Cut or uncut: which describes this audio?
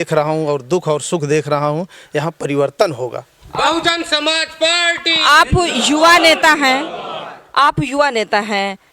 uncut